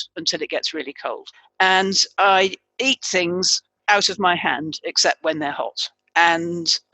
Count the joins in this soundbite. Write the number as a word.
one